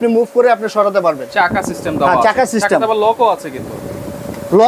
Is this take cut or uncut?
uncut